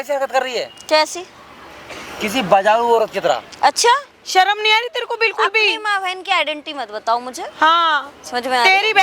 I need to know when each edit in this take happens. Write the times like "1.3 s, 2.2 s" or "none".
none